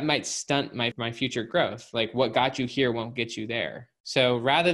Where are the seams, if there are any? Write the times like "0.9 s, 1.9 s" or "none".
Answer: 0.9 s

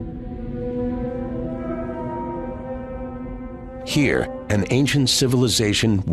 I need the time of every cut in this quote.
3.3 s

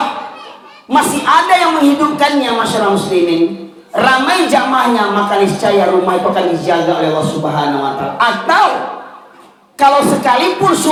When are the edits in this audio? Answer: none

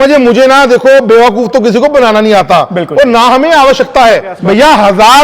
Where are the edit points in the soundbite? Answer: 4.3 s

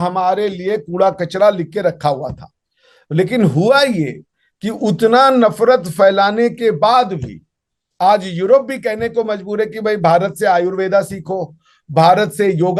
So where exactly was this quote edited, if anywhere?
none

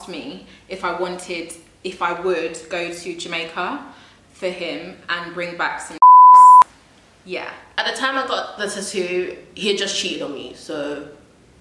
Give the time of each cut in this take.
7.8 s

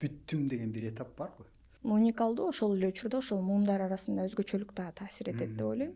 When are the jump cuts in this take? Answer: 1.6 s

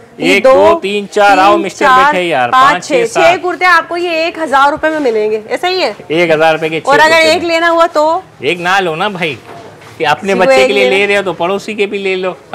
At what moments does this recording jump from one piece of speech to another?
none

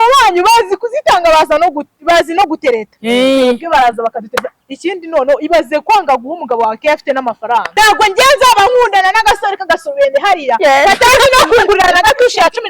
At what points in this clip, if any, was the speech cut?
7.7 s

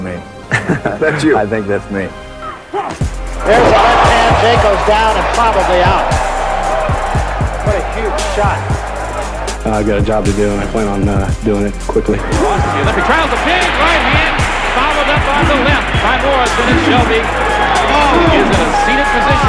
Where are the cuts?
13.9 s

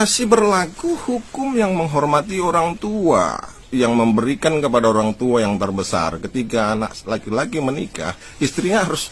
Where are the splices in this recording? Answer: none

